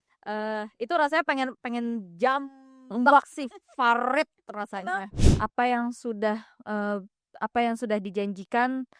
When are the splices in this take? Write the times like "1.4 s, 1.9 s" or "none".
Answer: 5.1 s